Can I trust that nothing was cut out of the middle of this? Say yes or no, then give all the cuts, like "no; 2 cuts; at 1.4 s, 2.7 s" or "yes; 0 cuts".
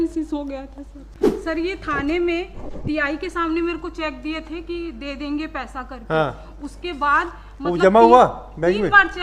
no; 1 cut; at 1.1 s